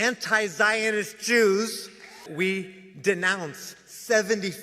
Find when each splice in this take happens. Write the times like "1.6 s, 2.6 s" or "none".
2.3 s